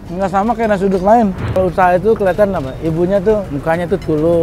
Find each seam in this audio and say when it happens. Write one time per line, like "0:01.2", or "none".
0:01.5
0:03.5